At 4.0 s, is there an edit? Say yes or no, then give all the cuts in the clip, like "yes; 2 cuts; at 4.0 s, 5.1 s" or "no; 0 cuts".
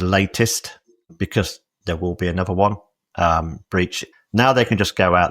yes; 2 cuts; at 1.0 s, 4.0 s